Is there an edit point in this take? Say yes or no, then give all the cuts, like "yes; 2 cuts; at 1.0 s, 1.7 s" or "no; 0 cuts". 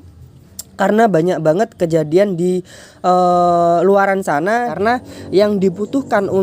yes; 1 cut; at 4.8 s